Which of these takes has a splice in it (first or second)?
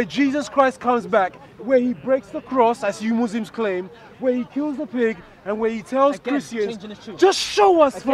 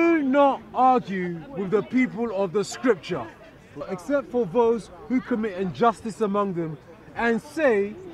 second